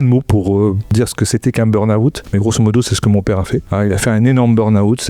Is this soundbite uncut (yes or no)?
no